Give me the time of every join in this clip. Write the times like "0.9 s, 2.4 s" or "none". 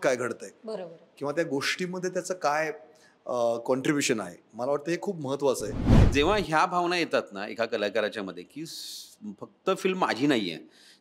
6.0 s